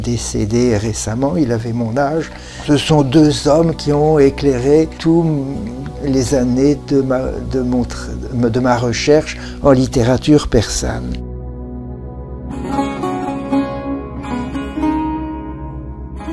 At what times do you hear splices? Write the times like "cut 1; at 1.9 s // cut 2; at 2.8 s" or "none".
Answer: cut 1; at 1.0 s